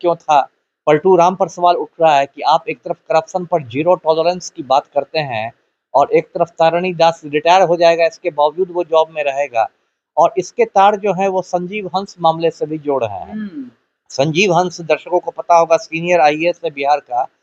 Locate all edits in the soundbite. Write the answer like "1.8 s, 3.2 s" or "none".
none